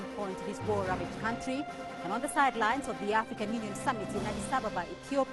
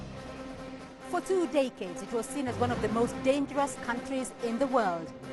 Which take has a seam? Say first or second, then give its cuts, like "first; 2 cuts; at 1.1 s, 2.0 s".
first; 1 cut; at 4.4 s